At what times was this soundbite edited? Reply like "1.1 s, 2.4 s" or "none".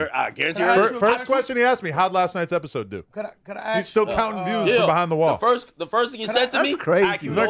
6.2 s